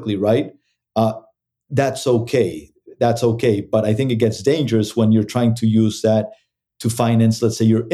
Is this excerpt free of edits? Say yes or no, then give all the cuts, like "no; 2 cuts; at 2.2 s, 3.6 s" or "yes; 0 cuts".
yes; 0 cuts